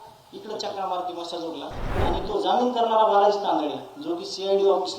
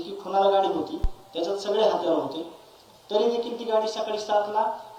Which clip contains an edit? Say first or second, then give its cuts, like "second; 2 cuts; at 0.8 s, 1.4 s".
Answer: first; 1 cut; at 2.0 s